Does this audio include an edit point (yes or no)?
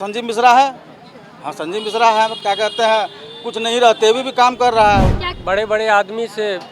yes